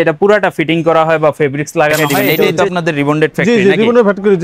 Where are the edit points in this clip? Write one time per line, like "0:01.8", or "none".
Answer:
0:02.1